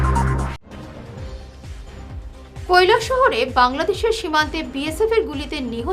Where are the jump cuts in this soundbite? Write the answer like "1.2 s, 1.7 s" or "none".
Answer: 2.6 s